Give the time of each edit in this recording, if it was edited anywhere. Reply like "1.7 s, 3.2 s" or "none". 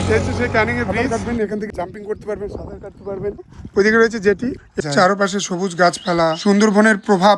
1.0 s, 4.8 s